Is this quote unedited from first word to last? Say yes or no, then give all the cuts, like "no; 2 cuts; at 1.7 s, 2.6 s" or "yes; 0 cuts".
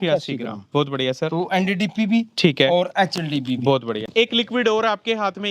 no; 1 cut; at 4.1 s